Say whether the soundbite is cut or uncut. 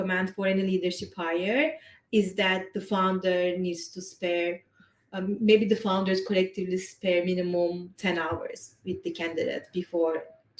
uncut